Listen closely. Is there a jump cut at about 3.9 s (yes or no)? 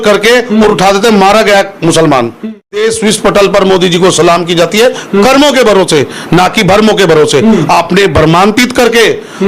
no